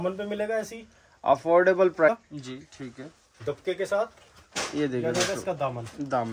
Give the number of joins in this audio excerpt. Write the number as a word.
one